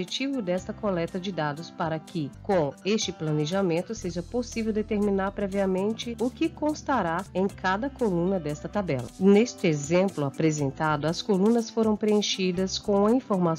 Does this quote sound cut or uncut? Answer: cut